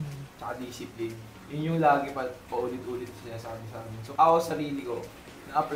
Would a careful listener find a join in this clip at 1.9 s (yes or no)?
no